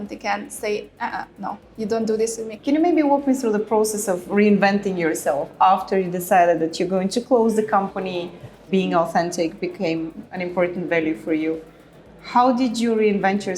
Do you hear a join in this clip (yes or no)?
yes